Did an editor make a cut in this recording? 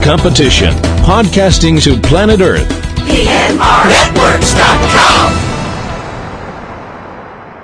no; 0 cuts

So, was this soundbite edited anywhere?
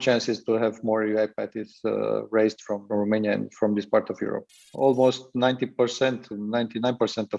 yes; 2 cuts; at 2.9 s, 4.6 s

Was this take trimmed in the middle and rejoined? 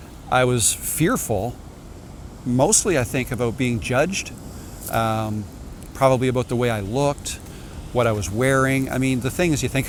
no; 0 cuts

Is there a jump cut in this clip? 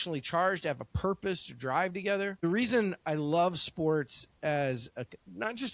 yes; 1 cut; at 2.4 s

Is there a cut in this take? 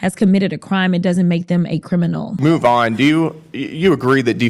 yes; 1 cut; at 2.3 s

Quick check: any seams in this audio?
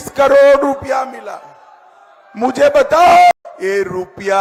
no; 0 cuts

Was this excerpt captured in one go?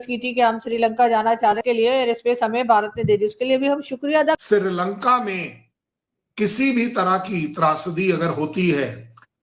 no; 2 cuts; at 1.6 s, 4.4 s

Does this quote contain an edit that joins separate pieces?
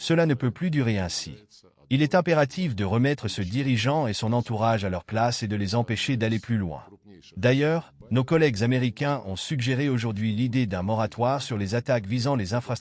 no; 0 cuts

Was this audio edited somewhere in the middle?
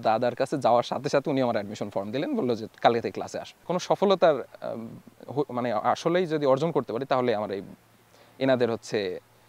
yes; 1 cut; at 3.5 s

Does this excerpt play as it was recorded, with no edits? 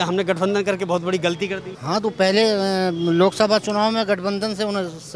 yes; 0 cuts

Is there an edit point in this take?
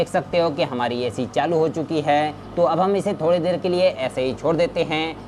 yes; 1 cut; at 2.4 s

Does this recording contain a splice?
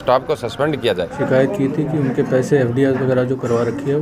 yes; 1 cut; at 1.2 s

